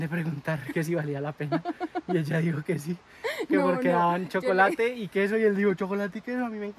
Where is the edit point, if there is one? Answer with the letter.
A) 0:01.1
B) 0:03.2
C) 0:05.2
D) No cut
D